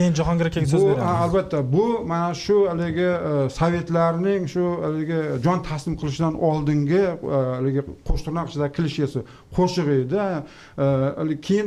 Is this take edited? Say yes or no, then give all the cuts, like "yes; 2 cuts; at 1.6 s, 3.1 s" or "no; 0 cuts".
no; 0 cuts